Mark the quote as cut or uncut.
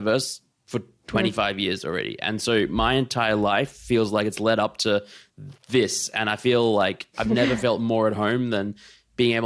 uncut